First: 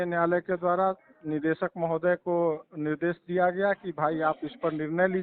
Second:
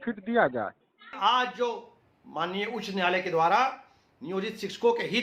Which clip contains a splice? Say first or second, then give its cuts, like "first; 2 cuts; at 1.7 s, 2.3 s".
second; 1 cut; at 1.1 s